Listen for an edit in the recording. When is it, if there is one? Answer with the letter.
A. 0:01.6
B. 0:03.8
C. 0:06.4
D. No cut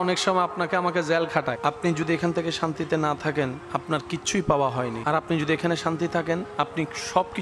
A